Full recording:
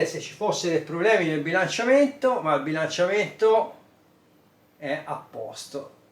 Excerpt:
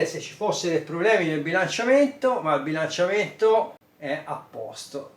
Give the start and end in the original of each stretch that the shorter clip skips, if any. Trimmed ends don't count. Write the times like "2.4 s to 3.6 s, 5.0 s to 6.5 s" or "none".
3.8 s to 4.6 s